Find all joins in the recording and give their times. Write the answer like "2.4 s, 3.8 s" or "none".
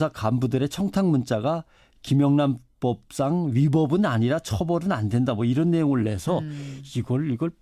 3.5 s